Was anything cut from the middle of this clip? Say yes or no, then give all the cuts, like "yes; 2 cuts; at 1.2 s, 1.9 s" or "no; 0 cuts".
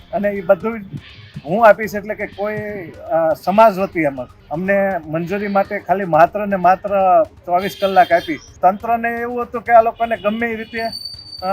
yes; 2 cuts; at 4.3 s, 8.5 s